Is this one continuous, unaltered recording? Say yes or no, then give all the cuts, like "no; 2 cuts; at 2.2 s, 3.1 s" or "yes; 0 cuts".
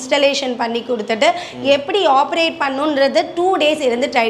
yes; 0 cuts